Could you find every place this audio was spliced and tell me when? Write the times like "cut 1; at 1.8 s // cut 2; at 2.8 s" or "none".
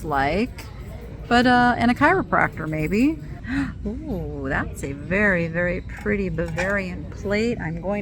cut 1; at 3.4 s